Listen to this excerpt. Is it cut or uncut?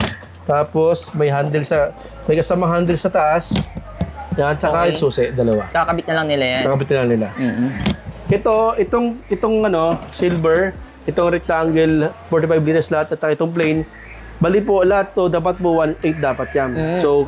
uncut